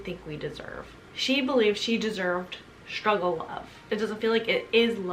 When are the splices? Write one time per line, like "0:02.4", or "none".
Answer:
0:01.0
0:03.8